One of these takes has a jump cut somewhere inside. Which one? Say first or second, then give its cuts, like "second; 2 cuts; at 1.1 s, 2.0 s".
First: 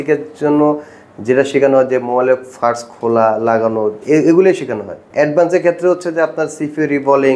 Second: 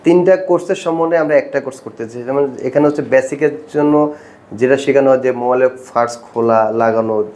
first; 1 cut; at 5.0 s